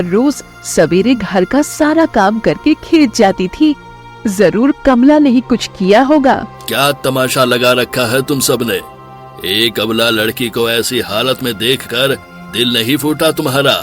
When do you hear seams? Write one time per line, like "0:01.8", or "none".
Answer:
0:06.6